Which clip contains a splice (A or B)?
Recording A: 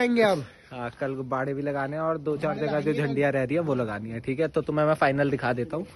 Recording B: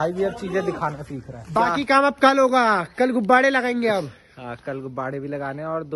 B